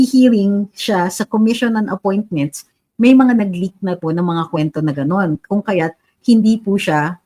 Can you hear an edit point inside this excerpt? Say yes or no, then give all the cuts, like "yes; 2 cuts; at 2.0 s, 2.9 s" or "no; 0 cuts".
no; 0 cuts